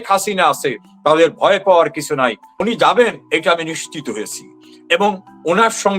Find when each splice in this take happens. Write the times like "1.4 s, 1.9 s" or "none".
2.5 s